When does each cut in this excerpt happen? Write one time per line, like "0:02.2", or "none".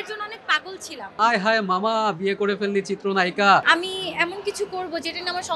0:01.2
0:03.6